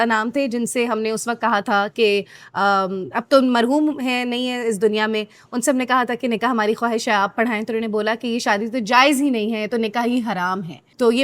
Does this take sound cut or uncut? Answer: uncut